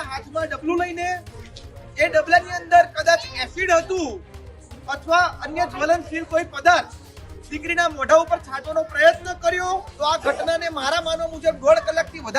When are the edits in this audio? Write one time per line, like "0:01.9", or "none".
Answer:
0:09.9